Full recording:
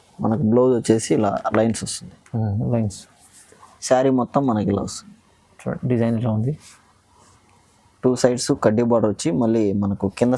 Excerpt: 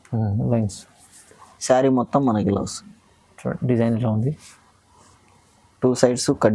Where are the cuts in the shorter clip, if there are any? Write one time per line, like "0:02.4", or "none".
none